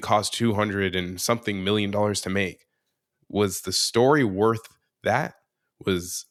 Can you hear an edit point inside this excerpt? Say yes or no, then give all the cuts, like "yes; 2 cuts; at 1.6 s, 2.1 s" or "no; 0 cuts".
no; 0 cuts